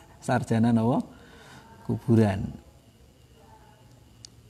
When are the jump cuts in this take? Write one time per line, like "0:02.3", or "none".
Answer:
none